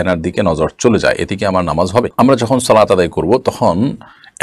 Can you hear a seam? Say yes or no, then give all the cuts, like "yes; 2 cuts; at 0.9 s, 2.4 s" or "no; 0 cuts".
no; 0 cuts